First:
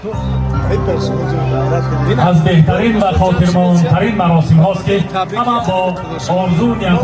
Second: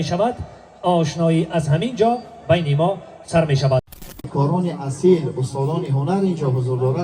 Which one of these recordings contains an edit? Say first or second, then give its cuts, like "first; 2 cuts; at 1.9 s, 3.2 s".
second; 1 cut; at 4.1 s